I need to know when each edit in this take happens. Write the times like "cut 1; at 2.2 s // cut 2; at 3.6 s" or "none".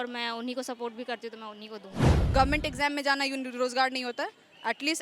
cut 1; at 2.1 s